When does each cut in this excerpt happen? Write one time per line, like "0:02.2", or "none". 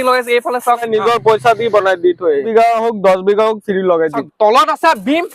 0:00.8
0:02.5
0:04.2